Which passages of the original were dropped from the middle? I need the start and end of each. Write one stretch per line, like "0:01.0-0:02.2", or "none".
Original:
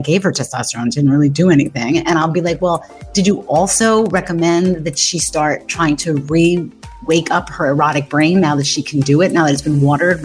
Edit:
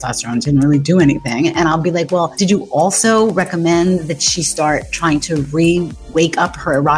0:02.8-0:03.1
0:06.7-0:06.9